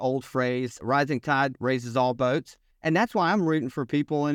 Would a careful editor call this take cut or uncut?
cut